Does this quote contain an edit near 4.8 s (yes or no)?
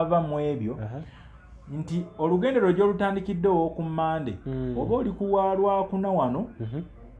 no